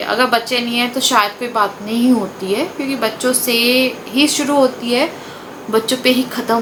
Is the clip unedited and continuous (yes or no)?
yes